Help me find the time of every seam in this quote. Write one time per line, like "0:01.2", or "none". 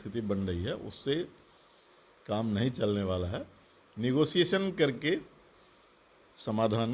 none